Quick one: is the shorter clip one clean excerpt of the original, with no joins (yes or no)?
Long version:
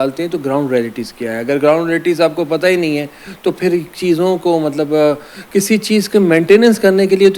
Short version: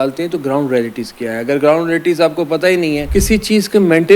no